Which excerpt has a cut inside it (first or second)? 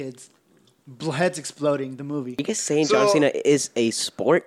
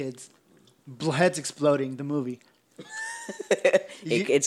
first